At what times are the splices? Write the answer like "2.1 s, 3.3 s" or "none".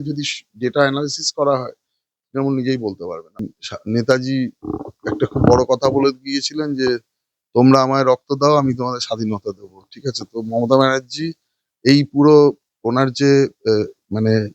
3.4 s